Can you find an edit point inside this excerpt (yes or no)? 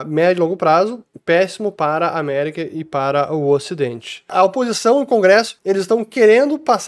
yes